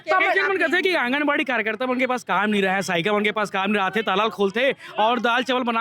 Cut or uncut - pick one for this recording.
uncut